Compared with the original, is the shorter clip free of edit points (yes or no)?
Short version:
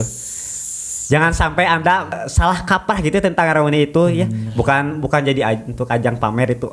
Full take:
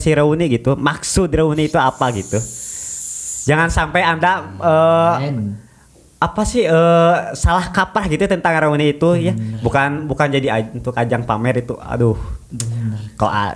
no